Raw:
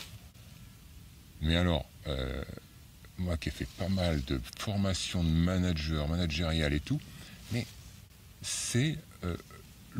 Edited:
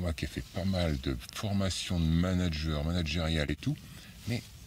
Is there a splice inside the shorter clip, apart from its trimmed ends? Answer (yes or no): no